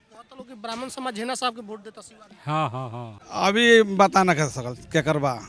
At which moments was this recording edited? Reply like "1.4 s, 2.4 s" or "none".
3.2 s